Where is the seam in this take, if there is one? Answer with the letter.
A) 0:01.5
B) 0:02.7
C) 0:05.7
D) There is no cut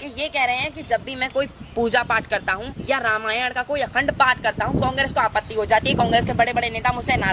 B